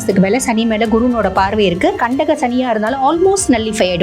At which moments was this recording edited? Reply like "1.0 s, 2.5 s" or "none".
2.0 s